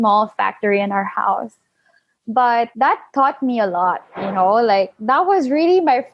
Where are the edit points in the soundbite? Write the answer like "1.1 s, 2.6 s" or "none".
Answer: 2.7 s